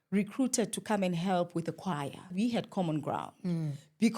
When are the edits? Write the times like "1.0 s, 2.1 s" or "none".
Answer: 2.3 s

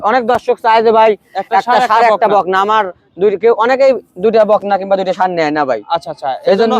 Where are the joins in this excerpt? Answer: none

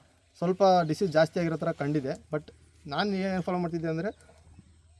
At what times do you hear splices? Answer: none

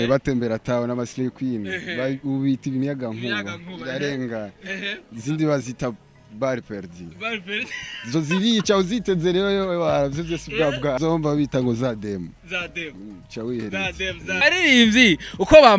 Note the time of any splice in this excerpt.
11.0 s, 14.4 s

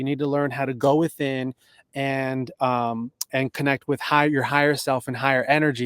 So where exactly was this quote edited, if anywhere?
none

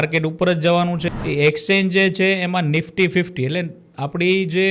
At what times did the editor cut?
1.0 s

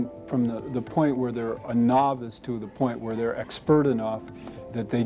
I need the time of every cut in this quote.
none

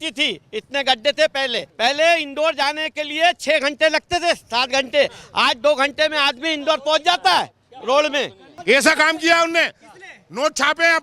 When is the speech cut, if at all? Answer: 1.7 s, 8.5 s

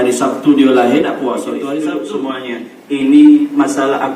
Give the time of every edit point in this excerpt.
2.0 s

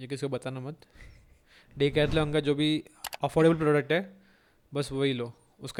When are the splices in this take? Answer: none

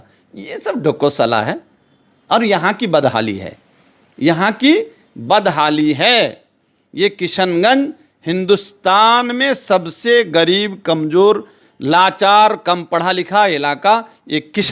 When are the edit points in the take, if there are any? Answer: none

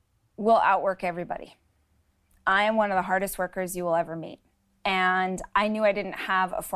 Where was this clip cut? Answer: none

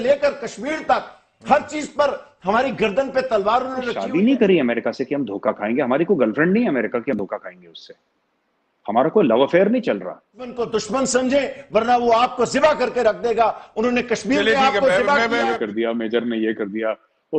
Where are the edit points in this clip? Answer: 4.0 s, 10.5 s, 15.5 s

